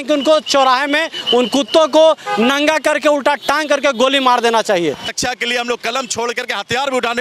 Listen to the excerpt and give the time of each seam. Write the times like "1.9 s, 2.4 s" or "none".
5.0 s